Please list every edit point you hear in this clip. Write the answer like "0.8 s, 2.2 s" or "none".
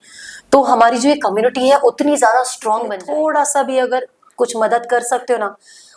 2.9 s